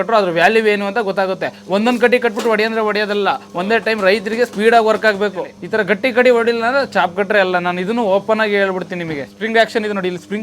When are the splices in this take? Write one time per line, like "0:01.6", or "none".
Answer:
0:05.6
0:09.3